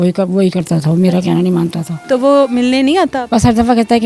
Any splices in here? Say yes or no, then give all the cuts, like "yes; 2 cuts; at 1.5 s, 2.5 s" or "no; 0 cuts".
yes; 2 cuts; at 1.9 s, 3.2 s